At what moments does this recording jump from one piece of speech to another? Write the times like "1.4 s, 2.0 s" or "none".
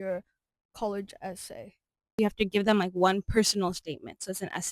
2.2 s